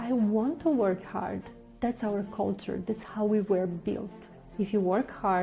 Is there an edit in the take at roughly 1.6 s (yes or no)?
no